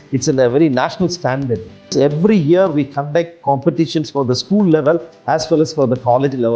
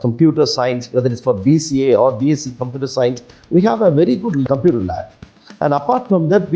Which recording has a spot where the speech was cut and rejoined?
first; 1 cut; at 1.9 s

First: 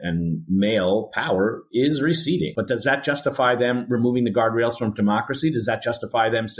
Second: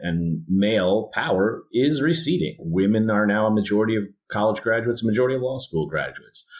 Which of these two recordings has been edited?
first; 1 cut; at 2.5 s

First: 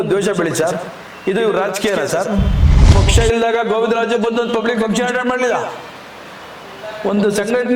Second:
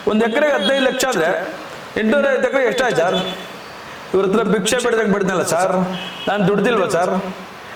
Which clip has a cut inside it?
first; 1 cut; at 2.9 s

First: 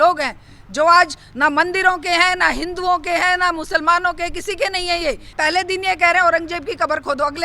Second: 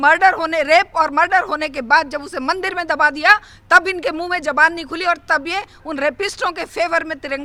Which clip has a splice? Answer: first; 1 cut; at 5.3 s

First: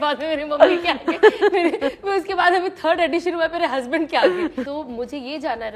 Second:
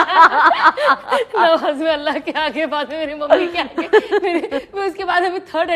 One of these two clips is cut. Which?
first; 1 cut; at 4.7 s

